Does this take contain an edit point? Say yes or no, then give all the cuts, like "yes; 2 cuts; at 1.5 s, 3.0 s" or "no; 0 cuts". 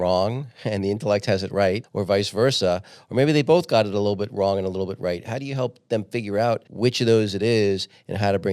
yes; 2 cuts; at 1.9 s, 6.7 s